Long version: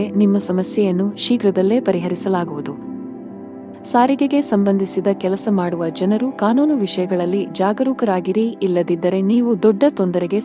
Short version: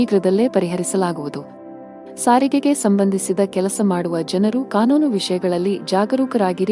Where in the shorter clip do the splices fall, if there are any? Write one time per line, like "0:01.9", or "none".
0:01.5